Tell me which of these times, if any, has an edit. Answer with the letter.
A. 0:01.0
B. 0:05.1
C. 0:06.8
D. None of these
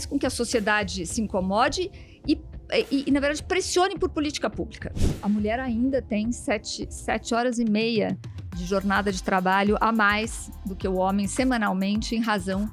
B